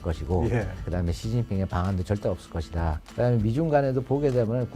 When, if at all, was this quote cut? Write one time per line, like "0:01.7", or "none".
0:01.0
0:03.0

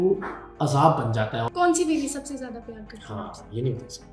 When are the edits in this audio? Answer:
0:01.4

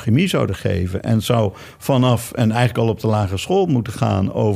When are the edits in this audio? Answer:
none

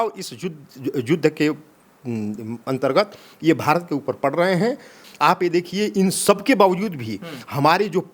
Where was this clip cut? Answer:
0:05.0

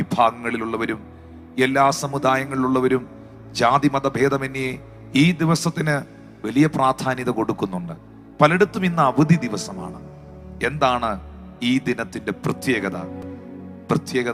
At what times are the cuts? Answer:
none

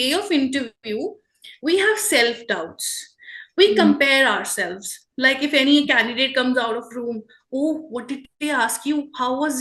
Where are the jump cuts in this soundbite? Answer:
none

